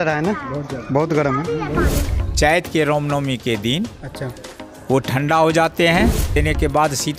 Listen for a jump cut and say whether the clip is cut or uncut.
cut